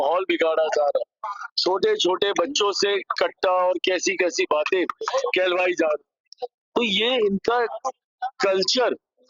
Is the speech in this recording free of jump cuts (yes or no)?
yes